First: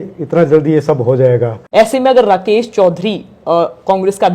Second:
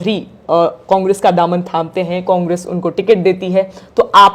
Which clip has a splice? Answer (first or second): first